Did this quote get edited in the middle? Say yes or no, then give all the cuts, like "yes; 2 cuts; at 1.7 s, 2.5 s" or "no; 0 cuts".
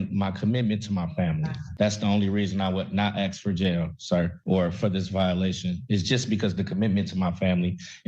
no; 0 cuts